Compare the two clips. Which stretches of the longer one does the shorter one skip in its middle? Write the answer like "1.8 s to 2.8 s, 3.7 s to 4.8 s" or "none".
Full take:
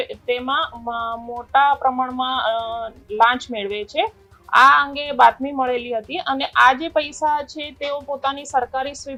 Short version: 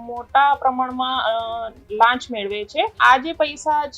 4.1 s to 6.5 s